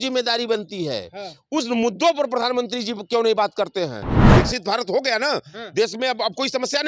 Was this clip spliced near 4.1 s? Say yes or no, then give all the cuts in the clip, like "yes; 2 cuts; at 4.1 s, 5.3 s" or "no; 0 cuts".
yes; 1 cut; at 4.1 s